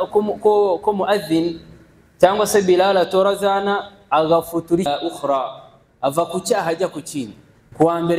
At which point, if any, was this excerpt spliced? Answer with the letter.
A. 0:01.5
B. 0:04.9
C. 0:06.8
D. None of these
B